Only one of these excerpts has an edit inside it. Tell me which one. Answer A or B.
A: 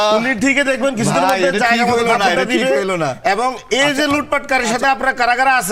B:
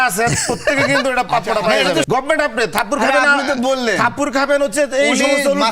B